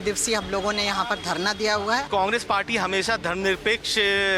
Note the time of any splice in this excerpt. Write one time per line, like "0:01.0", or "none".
0:02.1